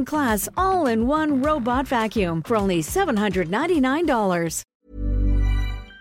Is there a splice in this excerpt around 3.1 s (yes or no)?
no